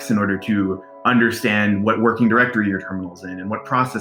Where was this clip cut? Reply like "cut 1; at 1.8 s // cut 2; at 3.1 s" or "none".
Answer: none